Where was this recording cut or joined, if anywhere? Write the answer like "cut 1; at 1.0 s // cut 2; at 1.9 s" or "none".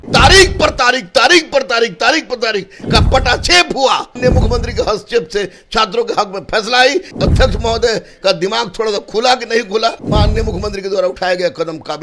cut 1; at 4.2 s // cut 2; at 7.1 s // cut 3; at 10.0 s